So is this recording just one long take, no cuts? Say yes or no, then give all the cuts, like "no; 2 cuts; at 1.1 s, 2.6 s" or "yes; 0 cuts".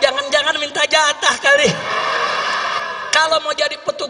no; 1 cut; at 2.8 s